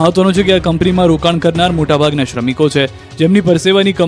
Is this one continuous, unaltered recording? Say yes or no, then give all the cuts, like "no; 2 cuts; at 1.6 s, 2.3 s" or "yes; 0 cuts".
no; 1 cut; at 1.8 s